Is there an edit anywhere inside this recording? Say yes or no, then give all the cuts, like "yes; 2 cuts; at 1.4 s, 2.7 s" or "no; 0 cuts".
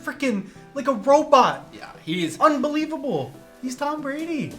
yes; 1 cut; at 3.4 s